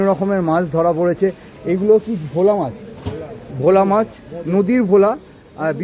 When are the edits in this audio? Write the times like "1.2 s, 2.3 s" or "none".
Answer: none